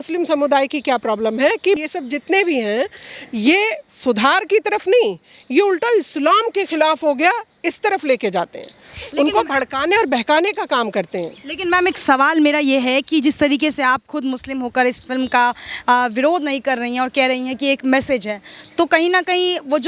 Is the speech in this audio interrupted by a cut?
no; 0 cuts

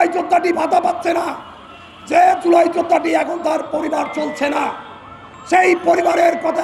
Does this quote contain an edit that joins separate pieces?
no; 0 cuts

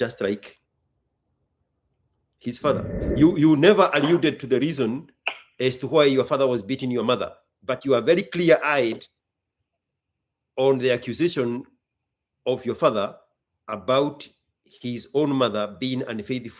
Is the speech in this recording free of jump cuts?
no; 1 cut; at 3.0 s

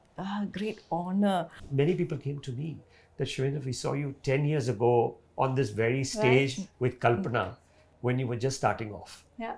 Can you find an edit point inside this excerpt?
yes; 1 cut; at 1.6 s

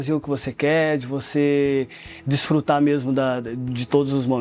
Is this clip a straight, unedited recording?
yes; 0 cuts

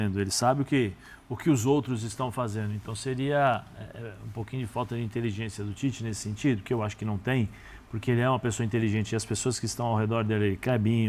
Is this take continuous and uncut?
yes; 0 cuts

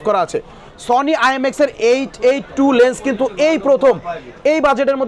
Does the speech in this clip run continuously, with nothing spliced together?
yes; 0 cuts

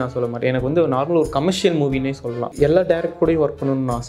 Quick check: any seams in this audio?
yes; 1 cut; at 2.5 s

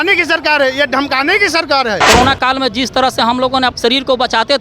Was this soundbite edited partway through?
yes; 2 cuts; at 2.0 s, 3.7 s

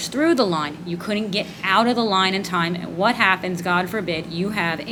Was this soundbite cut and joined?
no; 0 cuts

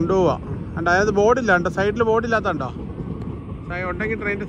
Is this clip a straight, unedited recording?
yes; 0 cuts

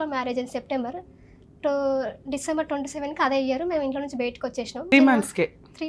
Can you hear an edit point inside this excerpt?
yes; 1 cut; at 4.9 s

